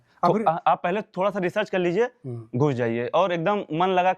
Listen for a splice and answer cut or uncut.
uncut